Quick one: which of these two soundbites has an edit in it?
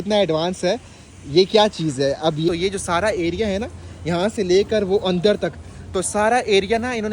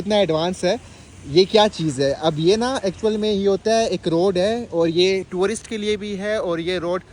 first; 1 cut; at 2.5 s

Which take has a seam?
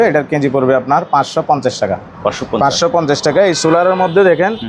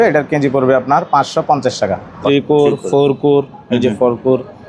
second; 1 cut; at 2.1 s

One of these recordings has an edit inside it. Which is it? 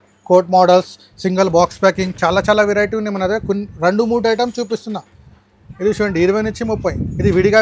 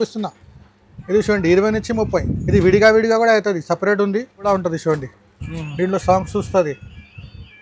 second; 1 cut; at 4.5 s

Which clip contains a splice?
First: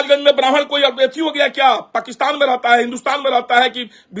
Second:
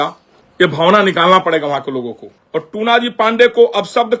second; 1 cut; at 2.3 s

